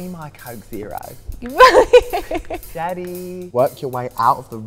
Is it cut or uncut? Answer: cut